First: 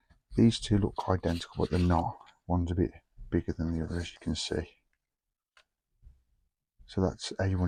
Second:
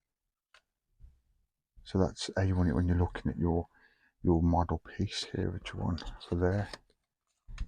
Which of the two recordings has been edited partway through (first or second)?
second